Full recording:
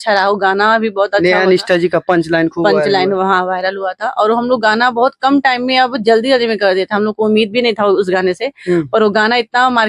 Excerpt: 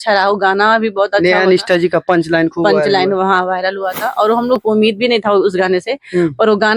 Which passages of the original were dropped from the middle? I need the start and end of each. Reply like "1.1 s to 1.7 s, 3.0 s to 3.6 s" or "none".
4.6 s to 7.1 s